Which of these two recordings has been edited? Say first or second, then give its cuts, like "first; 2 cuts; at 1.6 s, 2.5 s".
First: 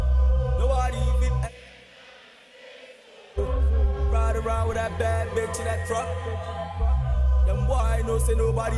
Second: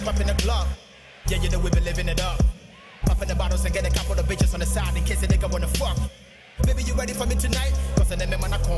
second; 1 cut; at 6.8 s